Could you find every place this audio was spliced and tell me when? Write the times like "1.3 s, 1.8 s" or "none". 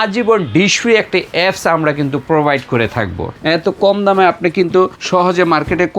3.2 s, 5.0 s